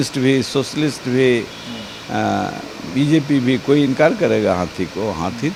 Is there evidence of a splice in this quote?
no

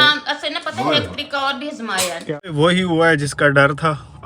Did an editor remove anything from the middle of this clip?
yes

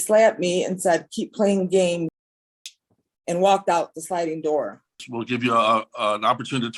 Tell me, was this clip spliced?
yes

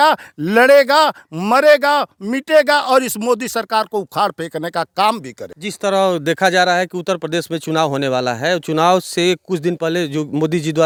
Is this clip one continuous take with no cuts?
yes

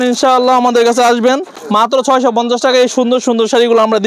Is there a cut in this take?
no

